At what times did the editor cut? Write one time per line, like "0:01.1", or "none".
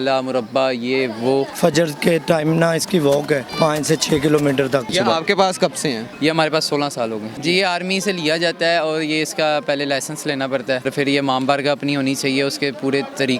0:01.5
0:03.5
0:04.9
0:06.1
0:07.3
0:10.9